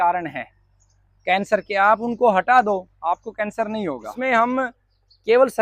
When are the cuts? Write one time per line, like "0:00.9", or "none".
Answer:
0:04.1